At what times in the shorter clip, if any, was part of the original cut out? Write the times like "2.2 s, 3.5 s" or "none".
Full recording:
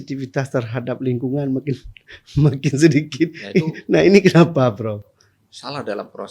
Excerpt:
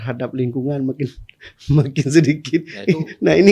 none